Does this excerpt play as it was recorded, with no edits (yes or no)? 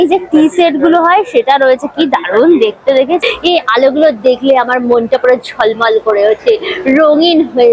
no